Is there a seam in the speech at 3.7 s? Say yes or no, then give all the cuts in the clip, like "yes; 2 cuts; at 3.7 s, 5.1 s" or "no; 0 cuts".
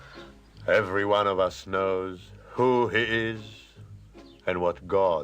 no; 1 cut; at 1.7 s